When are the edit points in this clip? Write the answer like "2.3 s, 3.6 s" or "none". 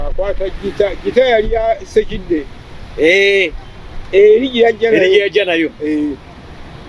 none